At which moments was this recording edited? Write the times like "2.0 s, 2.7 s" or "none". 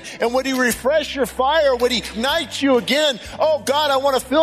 2.1 s